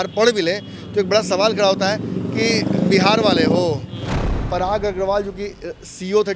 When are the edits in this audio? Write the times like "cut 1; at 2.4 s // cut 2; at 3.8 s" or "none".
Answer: cut 1; at 4.3 s